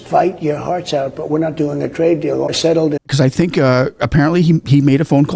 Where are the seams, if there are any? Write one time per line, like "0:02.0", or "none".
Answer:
0:02.5